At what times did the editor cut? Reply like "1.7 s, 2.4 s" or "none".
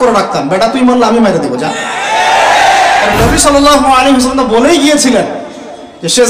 3.1 s